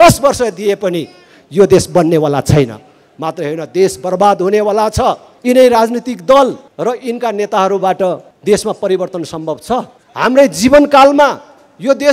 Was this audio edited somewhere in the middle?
yes; 4 cuts; at 5.3 s, 6.7 s, 8.3 s, 10.0 s

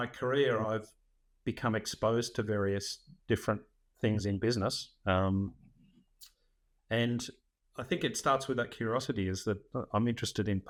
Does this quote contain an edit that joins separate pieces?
no; 0 cuts

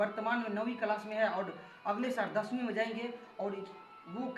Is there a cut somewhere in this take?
no; 0 cuts

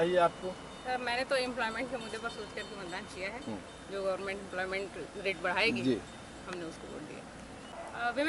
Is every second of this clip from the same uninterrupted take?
yes; 0 cuts

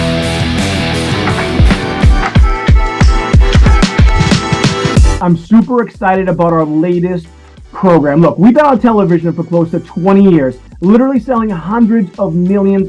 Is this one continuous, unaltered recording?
no; 1 cut; at 1.3 s

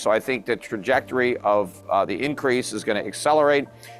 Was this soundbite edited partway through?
no; 0 cuts

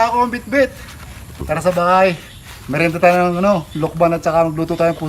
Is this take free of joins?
no; 1 cut; at 1.4 s

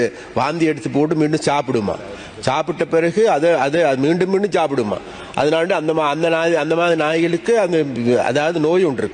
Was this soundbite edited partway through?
no; 0 cuts

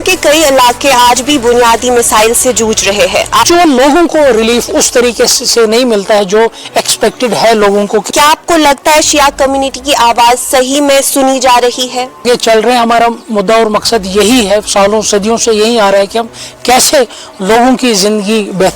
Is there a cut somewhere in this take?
yes; 3 cuts; at 3.4 s, 8.1 s, 12.2 s

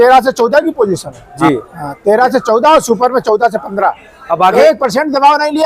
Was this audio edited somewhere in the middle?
yes; 2 cuts; at 1.3 s, 4.5 s

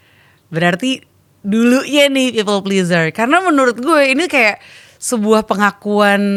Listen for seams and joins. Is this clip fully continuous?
yes; 0 cuts

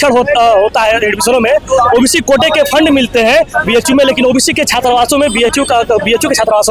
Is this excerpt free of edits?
yes; 0 cuts

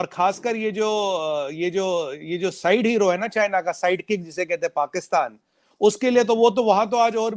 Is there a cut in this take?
no; 0 cuts

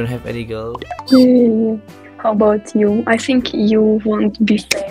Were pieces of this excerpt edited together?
yes; 1 cut; at 0.9 s

